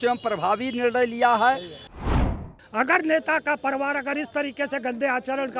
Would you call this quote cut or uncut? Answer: cut